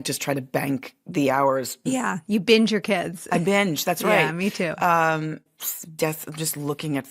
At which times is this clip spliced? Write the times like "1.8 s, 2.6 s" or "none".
5.5 s